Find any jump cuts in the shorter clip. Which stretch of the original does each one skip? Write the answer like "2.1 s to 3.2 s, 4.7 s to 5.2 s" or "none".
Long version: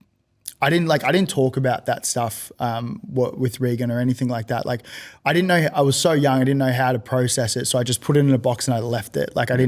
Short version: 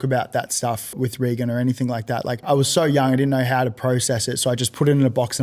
2.5 s to 3.3 s, 4.8 s to 5.7 s